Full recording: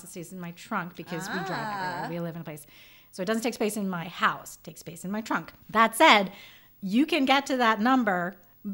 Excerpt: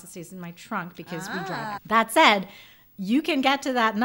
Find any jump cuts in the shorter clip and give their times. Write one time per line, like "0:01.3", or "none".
0:01.8